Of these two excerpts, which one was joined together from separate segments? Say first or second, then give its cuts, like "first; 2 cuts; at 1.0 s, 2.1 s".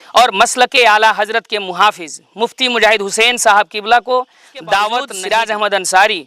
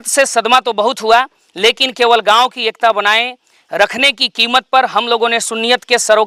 first; 1 cut; at 5.2 s